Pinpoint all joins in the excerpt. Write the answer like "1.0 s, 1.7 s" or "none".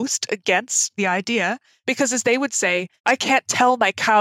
1.0 s, 1.7 s, 3.0 s